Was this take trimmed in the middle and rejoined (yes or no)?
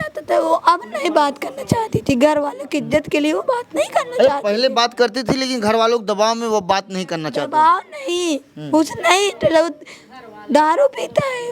no